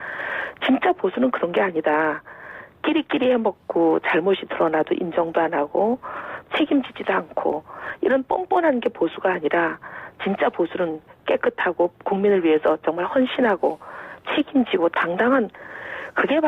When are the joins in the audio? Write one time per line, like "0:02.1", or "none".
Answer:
none